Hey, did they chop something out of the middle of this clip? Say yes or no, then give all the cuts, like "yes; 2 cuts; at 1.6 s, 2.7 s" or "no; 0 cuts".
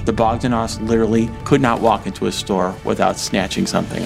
yes; 1 cut; at 1.4 s